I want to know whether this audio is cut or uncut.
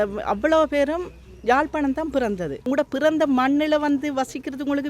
cut